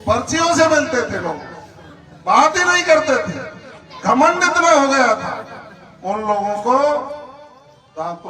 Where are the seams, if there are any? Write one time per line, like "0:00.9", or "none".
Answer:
none

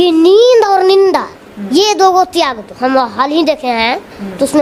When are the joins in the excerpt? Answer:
none

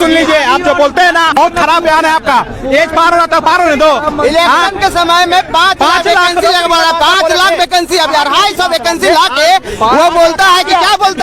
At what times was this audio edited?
0:01.4

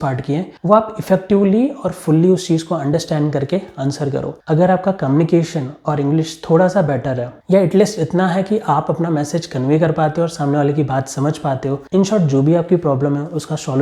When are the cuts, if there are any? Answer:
0:04.4
0:11.8

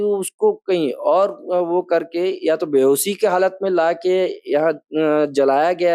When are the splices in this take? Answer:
none

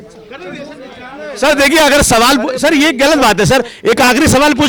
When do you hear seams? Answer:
none

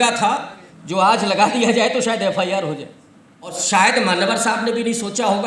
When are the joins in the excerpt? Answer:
0:03.6

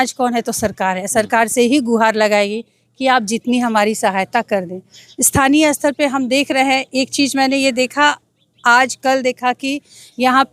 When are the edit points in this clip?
none

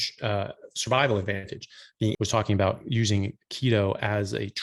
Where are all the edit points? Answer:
0:02.1

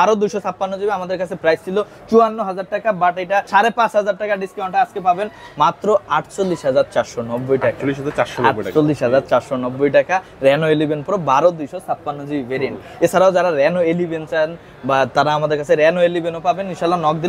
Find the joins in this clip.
none

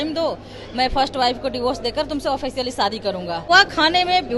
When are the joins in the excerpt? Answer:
0:03.5

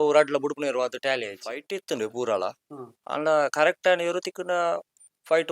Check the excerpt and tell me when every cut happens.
0:01.5

